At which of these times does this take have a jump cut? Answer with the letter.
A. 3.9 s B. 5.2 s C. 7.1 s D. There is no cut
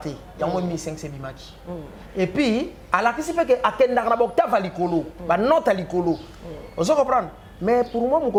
D